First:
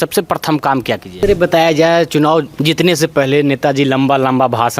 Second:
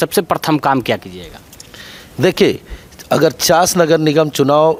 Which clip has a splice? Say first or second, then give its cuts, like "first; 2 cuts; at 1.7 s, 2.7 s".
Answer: first; 1 cut; at 1.1 s